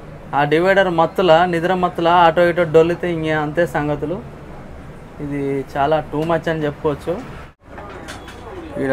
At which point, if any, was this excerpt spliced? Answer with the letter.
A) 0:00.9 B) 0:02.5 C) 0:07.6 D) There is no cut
C